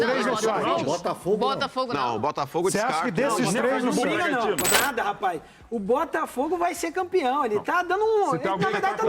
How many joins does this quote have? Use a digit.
1